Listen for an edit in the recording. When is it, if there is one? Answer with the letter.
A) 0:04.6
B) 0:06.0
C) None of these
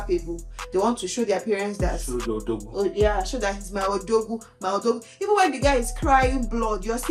C